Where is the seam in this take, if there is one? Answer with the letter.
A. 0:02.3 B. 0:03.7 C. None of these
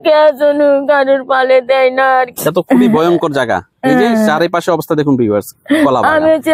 A